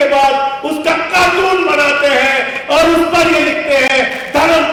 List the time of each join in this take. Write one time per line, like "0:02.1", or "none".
none

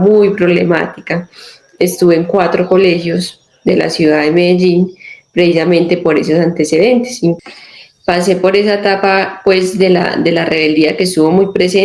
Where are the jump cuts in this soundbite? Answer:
0:07.4

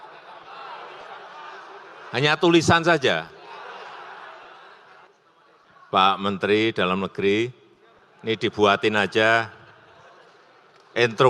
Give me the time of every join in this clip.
0:05.1

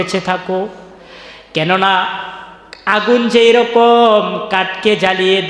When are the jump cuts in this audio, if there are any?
none

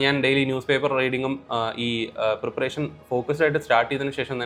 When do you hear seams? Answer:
none

